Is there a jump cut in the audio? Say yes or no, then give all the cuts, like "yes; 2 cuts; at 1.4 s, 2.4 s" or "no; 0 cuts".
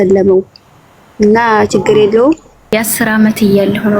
yes; 1 cut; at 2.7 s